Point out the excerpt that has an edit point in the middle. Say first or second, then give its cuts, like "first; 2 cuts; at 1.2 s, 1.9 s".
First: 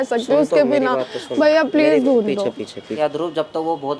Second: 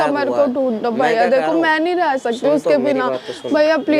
first; 1 cut; at 2.9 s